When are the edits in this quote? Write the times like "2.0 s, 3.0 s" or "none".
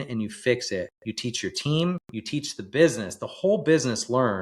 1.0 s, 2.1 s